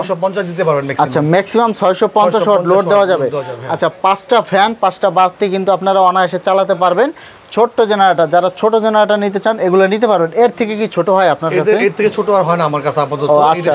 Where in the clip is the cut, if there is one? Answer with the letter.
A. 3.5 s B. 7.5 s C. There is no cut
C